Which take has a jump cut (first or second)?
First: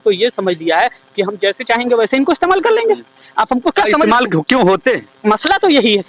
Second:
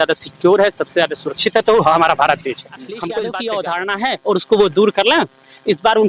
second